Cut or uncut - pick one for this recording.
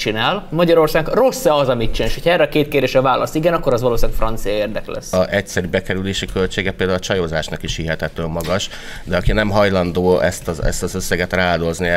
cut